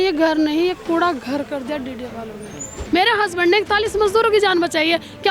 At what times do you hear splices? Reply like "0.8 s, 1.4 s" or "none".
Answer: 2.7 s

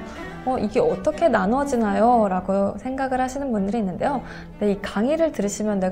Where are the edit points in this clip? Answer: 4.4 s

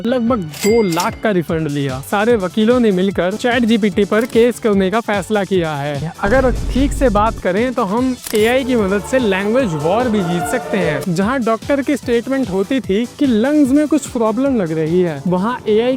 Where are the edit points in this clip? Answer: 2.1 s, 6.0 s, 11.0 s

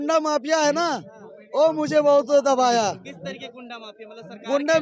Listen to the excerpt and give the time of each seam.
none

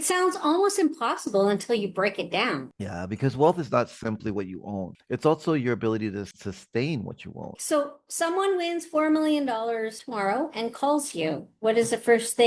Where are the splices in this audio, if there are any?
7.5 s

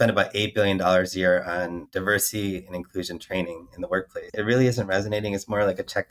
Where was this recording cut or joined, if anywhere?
1.8 s, 4.4 s

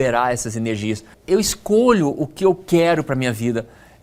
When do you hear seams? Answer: 1.1 s

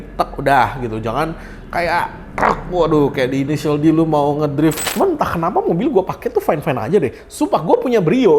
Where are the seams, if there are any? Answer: 4.9 s

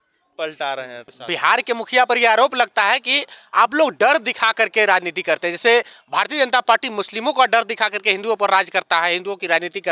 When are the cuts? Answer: 1.2 s

